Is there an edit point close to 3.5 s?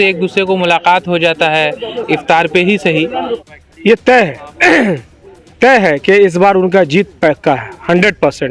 yes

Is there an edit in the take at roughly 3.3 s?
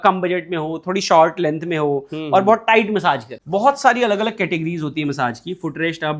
yes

